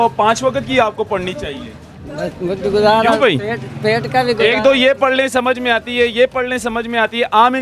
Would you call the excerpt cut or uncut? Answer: uncut